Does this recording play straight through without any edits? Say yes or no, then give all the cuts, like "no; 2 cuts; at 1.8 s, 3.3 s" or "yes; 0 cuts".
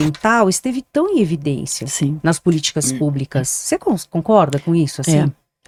yes; 0 cuts